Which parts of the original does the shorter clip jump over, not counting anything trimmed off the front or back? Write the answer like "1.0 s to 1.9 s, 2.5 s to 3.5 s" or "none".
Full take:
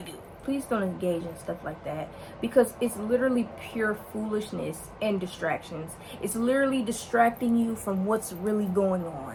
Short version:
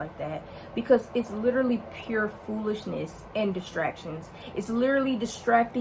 none